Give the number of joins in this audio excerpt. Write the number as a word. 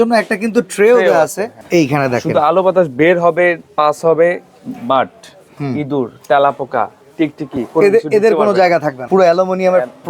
two